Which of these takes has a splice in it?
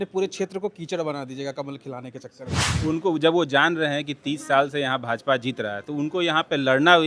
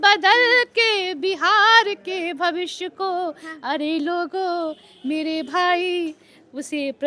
first; 1 cut; at 2.7 s

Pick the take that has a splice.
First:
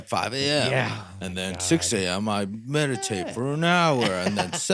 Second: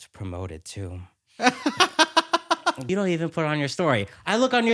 second; 1 cut; at 2.8 s

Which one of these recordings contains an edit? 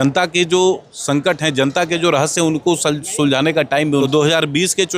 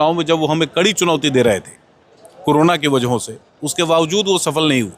first; 1 cut; at 4.0 s

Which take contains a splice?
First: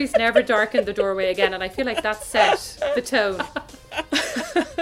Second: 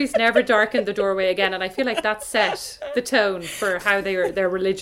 first; 1 cut; at 3.5 s

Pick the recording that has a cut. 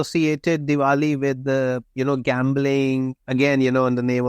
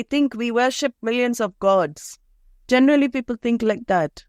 first; 1 cut; at 3.2 s

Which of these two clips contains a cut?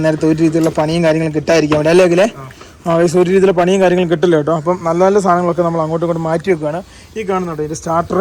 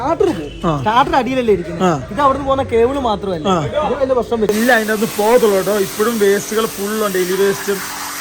second; 1 cut; at 4.5 s

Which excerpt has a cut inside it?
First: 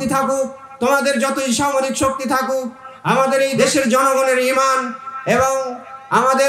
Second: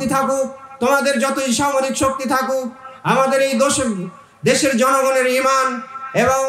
first; 1 cut; at 3.5 s

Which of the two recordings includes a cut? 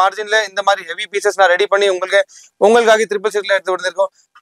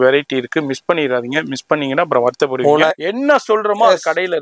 second; 1 cut; at 2.9 s

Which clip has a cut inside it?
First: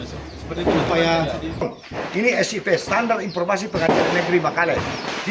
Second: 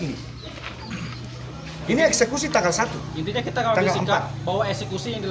first; 1 cut; at 1.7 s

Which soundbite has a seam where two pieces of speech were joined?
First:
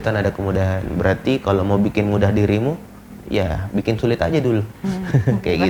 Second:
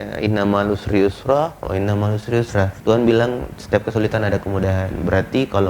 second; 1 cut; at 2.8 s

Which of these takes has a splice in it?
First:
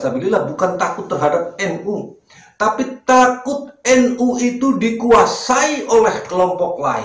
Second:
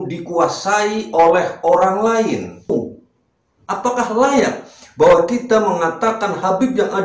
second; 1 cut; at 2.7 s

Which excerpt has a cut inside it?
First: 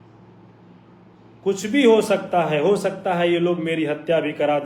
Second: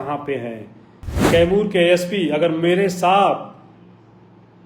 second; 1 cut; at 1.3 s

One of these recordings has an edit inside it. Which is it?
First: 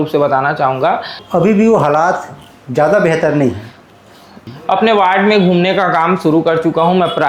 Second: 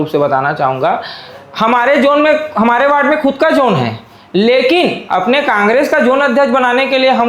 first; 2 cuts; at 1.2 s, 4.5 s

